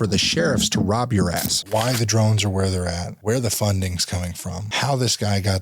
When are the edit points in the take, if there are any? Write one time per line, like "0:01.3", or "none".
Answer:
0:01.5
0:03.1
0:04.6